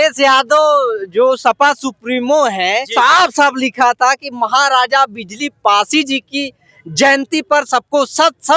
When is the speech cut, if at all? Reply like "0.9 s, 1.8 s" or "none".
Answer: 2.9 s